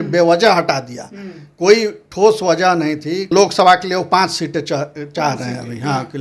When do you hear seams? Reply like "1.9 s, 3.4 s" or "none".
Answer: 3.3 s